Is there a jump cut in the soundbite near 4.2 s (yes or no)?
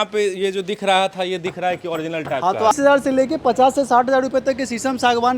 no